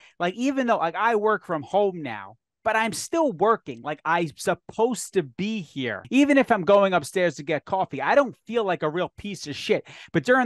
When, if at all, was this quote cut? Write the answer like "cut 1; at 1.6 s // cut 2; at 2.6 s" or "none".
cut 1; at 6.0 s